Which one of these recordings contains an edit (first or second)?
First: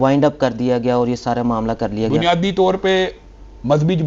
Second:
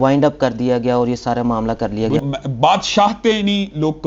second